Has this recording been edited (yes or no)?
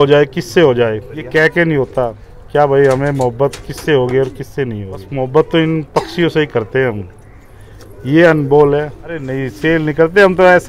yes